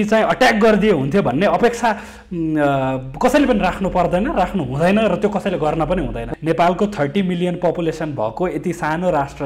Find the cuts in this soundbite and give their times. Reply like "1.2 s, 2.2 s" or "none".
6.3 s